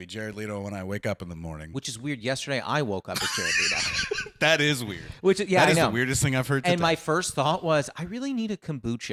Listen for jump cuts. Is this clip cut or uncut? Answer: uncut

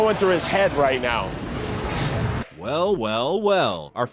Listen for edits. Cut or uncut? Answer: uncut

